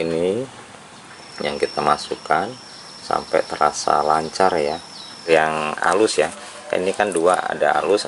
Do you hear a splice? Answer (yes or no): yes